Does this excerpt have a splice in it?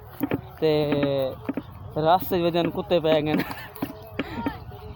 no; 0 cuts

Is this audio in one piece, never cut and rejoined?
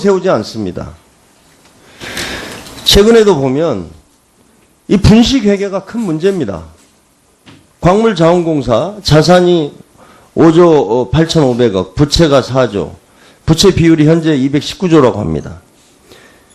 yes; 0 cuts

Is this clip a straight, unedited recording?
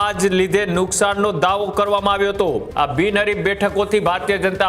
no; 1 cut; at 2.7 s

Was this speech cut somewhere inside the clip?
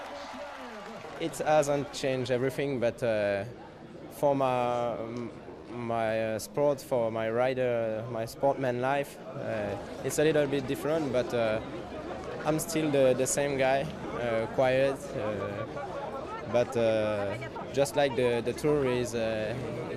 yes; 1 cut; at 1.0 s

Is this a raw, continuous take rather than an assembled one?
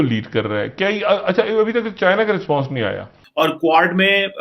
no; 1 cut; at 3.2 s

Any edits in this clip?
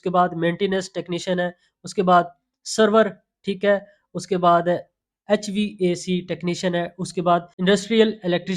yes; 1 cut; at 7.5 s

